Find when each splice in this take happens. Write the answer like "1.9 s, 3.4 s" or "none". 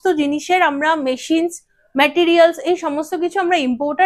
none